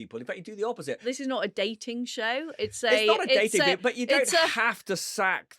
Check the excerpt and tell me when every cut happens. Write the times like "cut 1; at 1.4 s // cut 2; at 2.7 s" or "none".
cut 1; at 1.0 s